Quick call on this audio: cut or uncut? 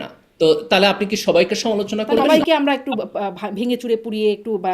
cut